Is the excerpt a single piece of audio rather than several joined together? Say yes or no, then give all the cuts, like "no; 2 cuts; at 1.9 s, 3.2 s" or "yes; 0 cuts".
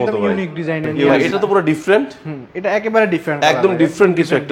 no; 1 cut; at 1.2 s